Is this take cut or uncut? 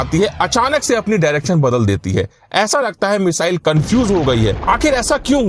cut